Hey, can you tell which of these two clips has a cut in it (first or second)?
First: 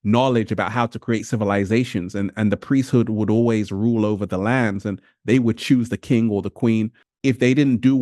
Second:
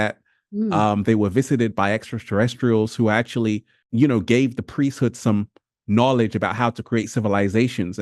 first